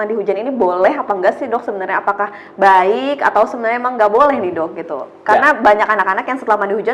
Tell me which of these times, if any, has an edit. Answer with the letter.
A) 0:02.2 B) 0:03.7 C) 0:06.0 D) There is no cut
D